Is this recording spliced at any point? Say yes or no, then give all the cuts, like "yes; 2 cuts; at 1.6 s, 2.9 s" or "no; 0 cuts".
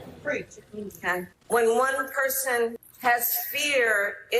yes; 2 cuts; at 1.4 s, 2.9 s